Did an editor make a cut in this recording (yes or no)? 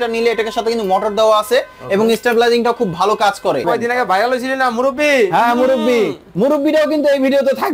yes